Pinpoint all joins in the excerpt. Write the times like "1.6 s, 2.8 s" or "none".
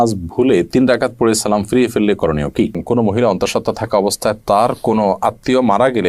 2.8 s